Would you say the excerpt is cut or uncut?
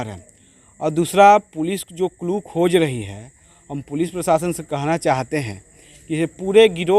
uncut